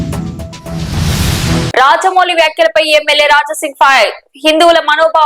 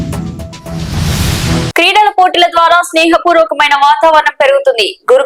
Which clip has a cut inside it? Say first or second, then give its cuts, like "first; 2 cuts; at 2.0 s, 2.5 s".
first; 1 cut; at 1.5 s